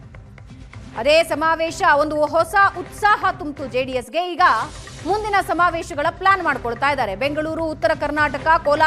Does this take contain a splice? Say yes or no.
yes